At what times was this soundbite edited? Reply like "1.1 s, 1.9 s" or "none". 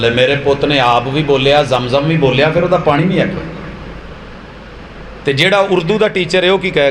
4.0 s